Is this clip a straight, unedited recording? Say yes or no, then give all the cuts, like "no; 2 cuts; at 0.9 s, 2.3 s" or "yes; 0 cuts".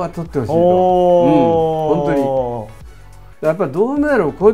yes; 0 cuts